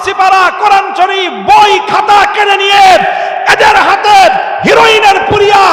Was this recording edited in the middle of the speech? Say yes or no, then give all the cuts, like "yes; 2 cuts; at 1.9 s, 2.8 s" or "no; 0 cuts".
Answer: no; 0 cuts